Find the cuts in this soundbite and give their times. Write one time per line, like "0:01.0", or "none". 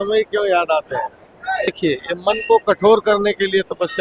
0:01.7